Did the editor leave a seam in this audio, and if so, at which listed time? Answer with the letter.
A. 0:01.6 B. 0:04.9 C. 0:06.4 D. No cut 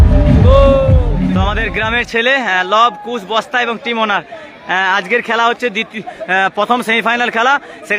A